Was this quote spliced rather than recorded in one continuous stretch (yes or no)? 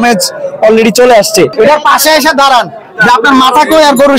yes